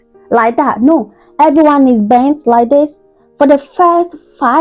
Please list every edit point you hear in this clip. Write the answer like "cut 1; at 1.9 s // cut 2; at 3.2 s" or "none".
none